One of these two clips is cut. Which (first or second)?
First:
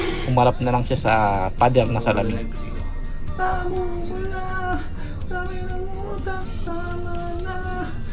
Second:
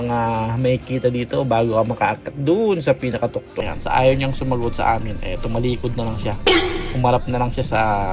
second